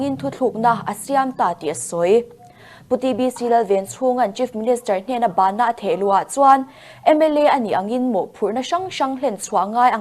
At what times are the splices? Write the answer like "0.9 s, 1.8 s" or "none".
2.4 s